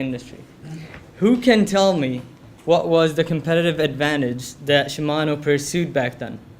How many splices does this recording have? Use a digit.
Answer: 1